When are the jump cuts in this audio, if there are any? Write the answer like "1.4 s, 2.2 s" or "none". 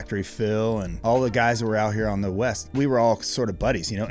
0.9 s, 2.7 s